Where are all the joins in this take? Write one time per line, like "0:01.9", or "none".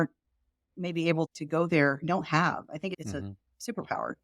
0:01.3
0:03.0